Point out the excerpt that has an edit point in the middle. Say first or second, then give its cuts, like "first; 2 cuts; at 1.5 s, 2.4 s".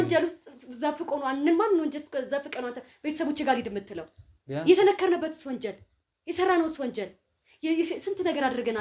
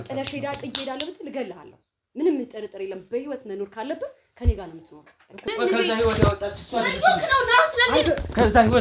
second; 1 cut; at 5.5 s